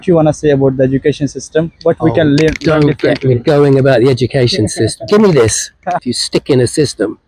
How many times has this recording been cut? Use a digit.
1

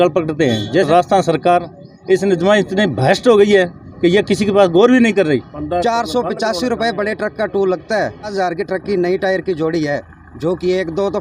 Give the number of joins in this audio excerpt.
3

